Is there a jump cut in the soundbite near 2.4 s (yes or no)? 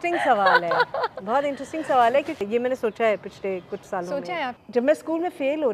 yes